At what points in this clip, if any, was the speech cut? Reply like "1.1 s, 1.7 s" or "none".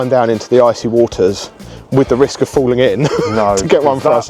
none